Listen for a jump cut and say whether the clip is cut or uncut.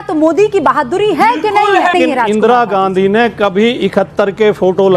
cut